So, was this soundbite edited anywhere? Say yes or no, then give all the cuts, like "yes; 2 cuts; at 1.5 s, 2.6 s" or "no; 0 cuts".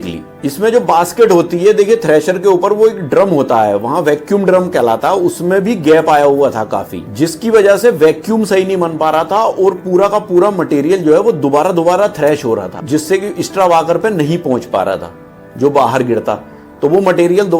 no; 0 cuts